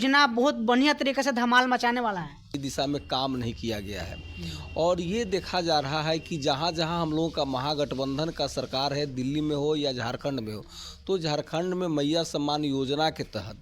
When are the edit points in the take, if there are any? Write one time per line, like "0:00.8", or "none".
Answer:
0:02.6